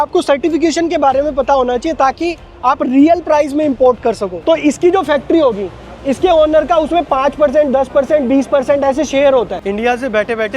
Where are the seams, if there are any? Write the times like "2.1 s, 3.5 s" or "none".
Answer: 4.4 s, 9.6 s